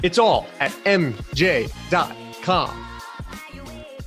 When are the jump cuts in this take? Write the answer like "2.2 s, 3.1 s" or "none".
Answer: 2.7 s